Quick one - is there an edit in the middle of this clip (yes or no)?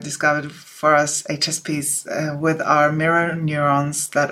no